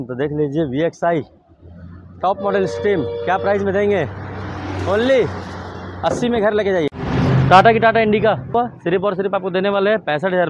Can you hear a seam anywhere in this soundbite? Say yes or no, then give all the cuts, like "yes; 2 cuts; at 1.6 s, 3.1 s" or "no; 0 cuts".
yes; 2 cuts; at 6.9 s, 8.5 s